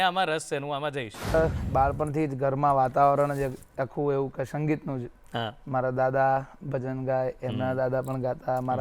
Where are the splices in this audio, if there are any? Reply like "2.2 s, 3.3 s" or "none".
1.3 s